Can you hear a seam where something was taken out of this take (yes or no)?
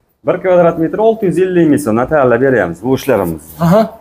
no